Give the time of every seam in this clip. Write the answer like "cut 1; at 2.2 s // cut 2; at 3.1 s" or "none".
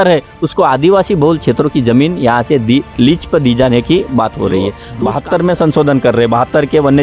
cut 1; at 4.9 s